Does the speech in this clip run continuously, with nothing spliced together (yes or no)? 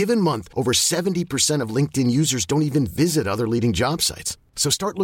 yes